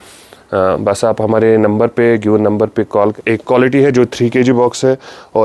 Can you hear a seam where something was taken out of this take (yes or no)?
yes